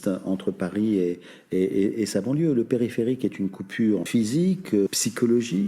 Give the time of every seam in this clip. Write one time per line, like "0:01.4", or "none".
0:04.1
0:04.9